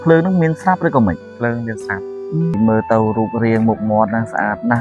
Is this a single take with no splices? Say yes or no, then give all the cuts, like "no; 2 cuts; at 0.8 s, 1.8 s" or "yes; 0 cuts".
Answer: no; 1 cut; at 2.5 s